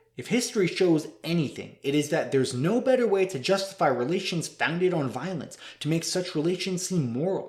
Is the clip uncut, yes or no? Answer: yes